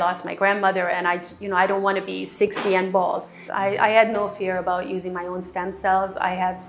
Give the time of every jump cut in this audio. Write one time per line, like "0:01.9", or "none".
0:03.4